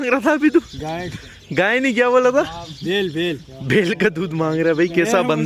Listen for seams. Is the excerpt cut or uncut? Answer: uncut